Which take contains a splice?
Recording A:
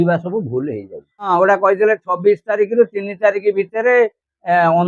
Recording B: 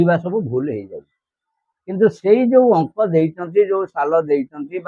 A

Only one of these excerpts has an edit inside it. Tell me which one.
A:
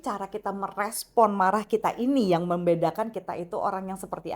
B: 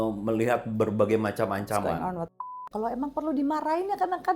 B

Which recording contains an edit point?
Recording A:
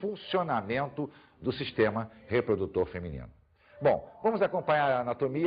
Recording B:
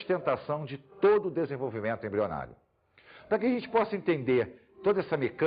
A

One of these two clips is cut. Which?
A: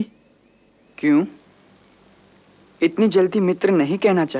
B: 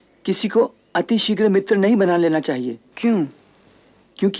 B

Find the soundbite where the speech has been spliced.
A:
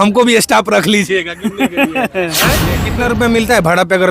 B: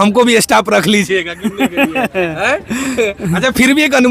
A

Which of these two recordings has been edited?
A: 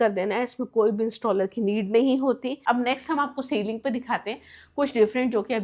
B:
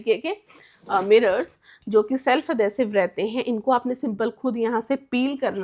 A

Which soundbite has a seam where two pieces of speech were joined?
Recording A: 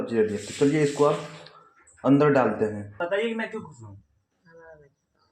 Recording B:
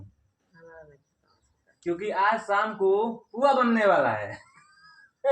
A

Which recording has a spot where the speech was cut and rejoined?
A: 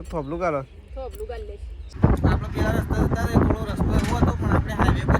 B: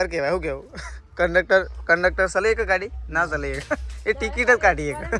A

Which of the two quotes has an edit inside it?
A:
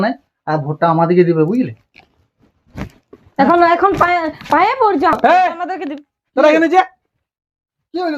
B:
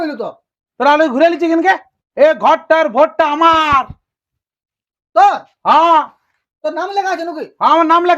B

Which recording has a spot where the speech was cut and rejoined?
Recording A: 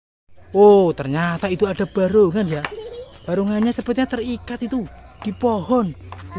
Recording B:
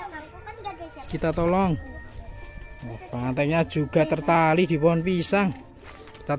B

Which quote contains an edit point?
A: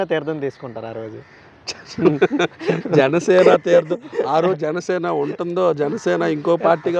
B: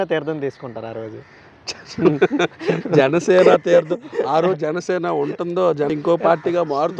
B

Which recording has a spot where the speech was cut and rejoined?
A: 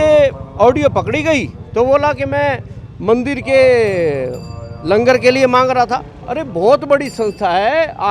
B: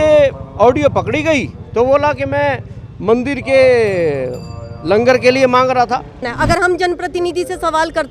B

